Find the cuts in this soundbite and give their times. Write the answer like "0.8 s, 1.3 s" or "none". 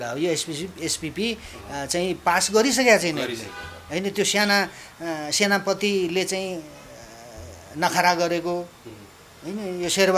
none